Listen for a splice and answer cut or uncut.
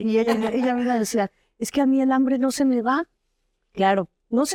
uncut